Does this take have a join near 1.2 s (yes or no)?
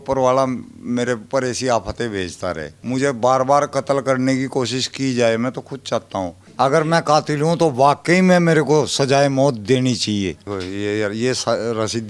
no